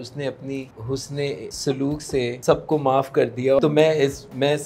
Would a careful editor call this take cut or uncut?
cut